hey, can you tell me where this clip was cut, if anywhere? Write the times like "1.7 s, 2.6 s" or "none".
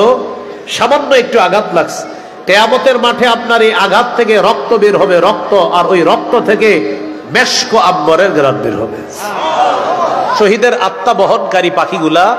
10.4 s